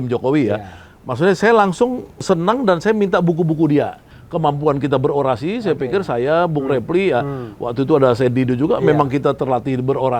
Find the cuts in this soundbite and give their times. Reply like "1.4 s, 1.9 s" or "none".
2.2 s, 4.1 s